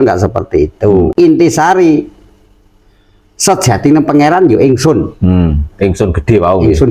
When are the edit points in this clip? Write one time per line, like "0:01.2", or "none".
0:01.1